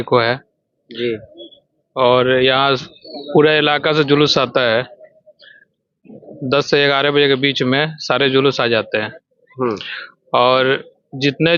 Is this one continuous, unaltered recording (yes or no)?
yes